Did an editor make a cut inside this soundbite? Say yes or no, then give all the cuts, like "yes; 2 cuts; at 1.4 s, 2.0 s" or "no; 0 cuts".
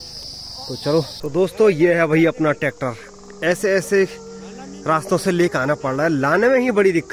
yes; 1 cut; at 1.2 s